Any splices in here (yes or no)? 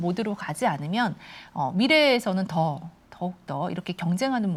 no